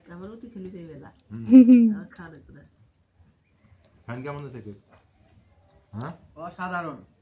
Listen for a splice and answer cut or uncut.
uncut